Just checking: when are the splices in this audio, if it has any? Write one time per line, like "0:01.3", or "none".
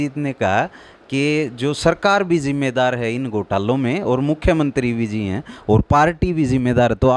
none